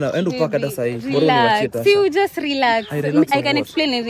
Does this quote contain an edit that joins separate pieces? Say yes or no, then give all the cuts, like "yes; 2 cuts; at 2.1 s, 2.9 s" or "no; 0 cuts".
no; 0 cuts